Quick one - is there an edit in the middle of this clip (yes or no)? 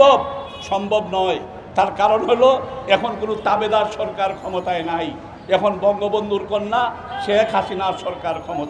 no